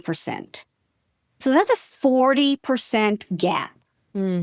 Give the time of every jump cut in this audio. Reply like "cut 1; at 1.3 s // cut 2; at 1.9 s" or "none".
cut 1; at 1.4 s